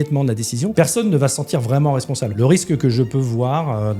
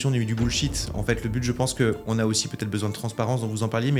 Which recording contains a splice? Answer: first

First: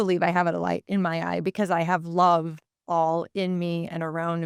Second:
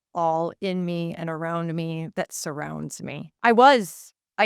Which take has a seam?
second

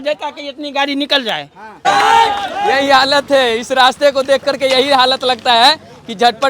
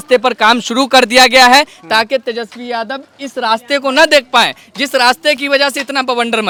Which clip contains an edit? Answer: first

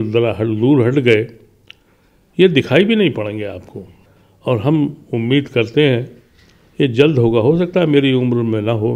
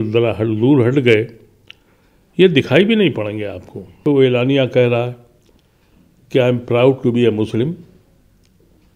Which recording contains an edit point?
second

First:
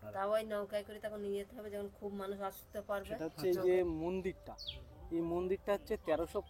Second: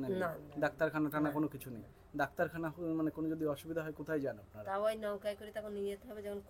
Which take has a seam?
first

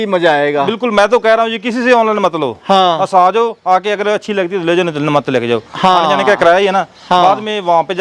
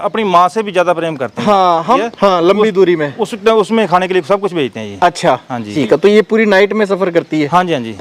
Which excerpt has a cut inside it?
second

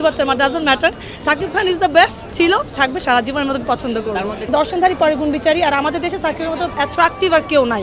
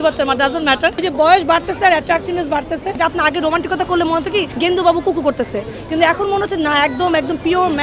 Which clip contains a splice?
second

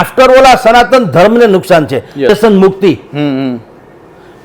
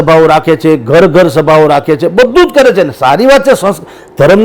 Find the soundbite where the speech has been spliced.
first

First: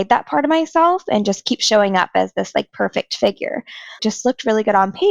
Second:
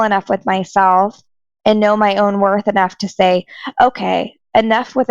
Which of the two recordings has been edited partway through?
first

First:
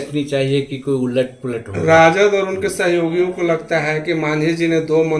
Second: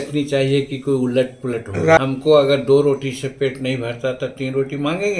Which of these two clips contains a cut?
second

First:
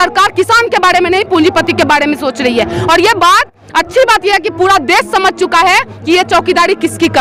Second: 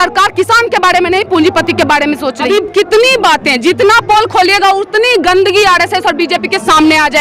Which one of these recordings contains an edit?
second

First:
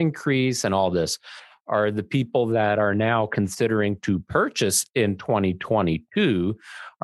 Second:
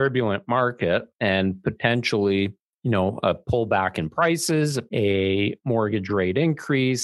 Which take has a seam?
second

